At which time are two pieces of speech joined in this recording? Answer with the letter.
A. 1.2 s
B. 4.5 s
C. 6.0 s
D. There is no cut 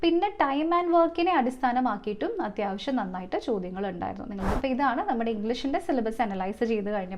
B